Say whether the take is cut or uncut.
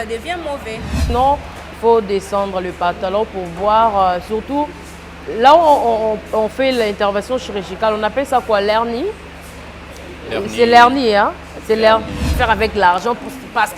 cut